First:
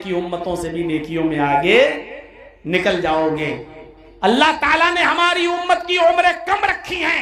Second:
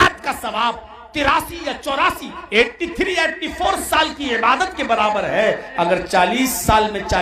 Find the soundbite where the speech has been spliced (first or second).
second